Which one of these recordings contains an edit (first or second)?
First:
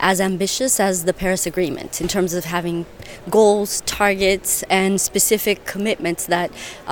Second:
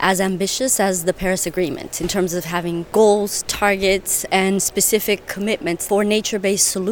second